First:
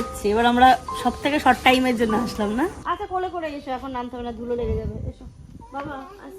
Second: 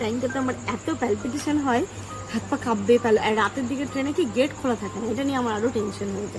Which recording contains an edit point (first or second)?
first